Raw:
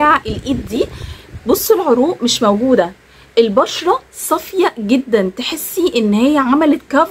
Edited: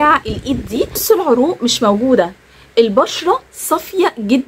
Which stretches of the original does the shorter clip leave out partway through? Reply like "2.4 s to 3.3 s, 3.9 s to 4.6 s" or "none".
1.0 s to 1.6 s